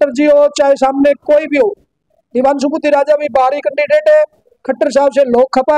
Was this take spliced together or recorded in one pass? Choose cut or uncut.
uncut